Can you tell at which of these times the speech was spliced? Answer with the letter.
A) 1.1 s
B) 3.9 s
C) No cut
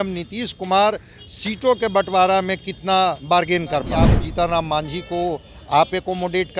B